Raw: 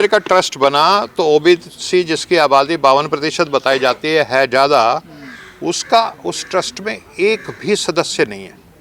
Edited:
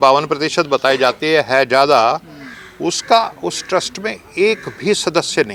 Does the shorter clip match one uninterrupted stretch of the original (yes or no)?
yes